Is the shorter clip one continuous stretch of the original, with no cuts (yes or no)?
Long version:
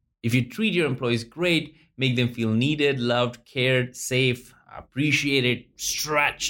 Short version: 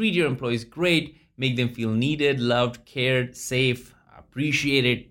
yes